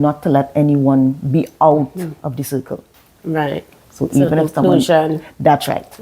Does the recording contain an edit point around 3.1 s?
no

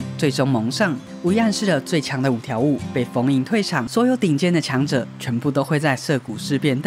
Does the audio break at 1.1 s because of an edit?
yes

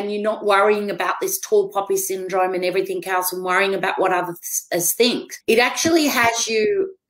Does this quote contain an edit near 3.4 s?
no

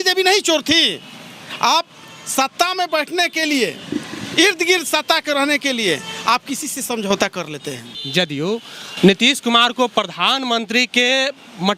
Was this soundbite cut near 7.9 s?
yes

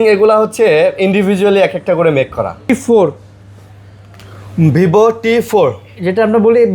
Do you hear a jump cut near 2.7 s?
yes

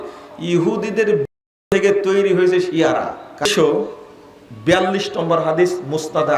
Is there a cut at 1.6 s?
no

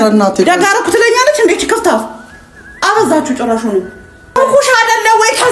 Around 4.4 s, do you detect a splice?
yes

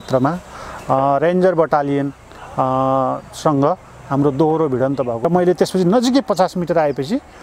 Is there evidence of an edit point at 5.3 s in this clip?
yes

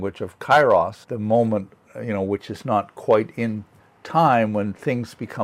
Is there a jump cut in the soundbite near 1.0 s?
yes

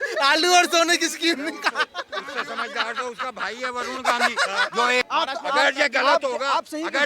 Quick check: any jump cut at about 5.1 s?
yes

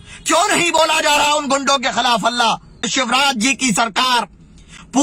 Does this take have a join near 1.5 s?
no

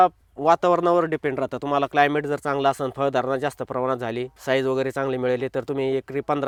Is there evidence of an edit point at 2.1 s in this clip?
no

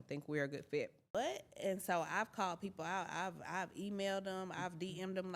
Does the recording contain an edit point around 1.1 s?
yes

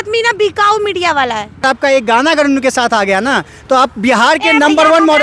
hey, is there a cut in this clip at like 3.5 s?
no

